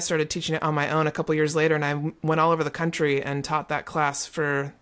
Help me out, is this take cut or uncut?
uncut